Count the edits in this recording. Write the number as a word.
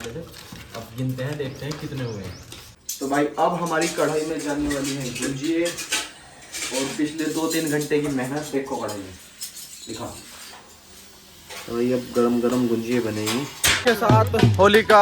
two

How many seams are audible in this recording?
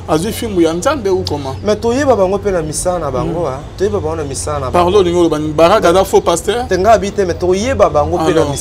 zero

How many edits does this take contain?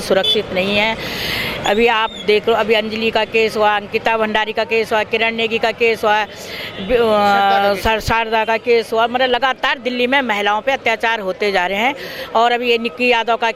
zero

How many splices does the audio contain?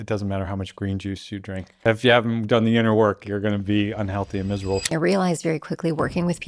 two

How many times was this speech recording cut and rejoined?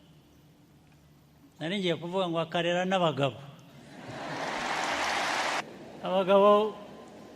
one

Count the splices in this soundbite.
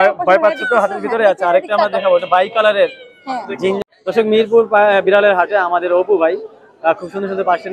one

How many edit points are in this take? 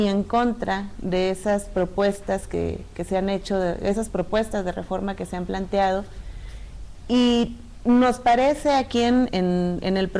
zero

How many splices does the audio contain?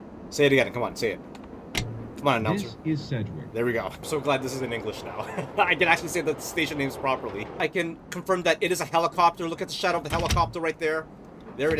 two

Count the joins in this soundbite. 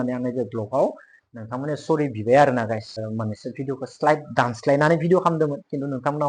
one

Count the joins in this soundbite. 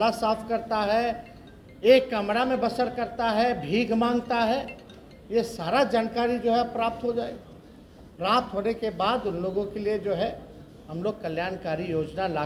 zero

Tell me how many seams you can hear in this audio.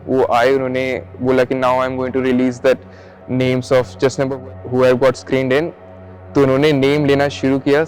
one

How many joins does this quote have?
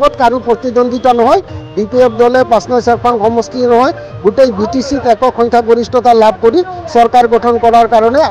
zero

